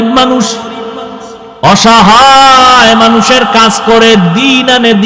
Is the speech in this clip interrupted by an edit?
yes; 1 cut; at 1.7 s

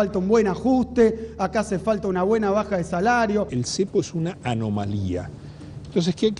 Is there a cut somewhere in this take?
yes; 1 cut; at 3.5 s

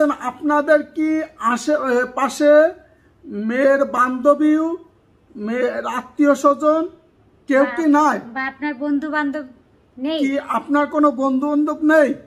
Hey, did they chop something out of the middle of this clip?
no; 0 cuts

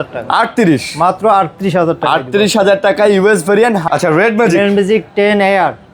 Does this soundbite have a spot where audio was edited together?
yes; 1 cut; at 3.8 s

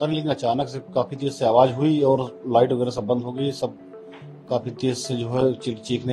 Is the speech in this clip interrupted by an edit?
no; 0 cuts

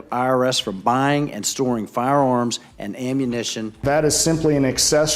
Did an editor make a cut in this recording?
yes; 1 cut; at 3.7 s

